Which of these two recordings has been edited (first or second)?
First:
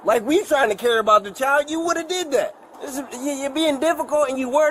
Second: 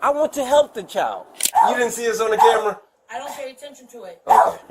second